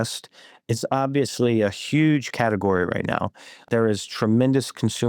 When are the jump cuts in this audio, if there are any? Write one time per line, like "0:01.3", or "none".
0:03.6